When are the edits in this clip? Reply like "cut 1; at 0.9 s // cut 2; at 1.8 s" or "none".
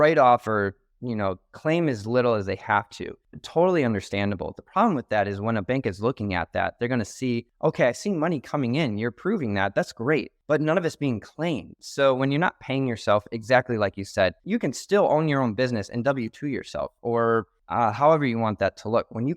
cut 1; at 7.5 s // cut 2; at 10.3 s // cut 3; at 14.4 s // cut 4; at 17.6 s